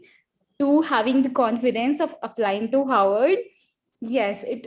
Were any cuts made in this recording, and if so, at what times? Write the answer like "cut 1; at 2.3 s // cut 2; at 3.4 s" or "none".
none